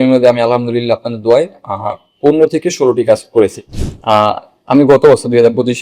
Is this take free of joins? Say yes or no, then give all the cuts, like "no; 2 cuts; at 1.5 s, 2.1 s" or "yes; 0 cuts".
no; 1 cut; at 3.6 s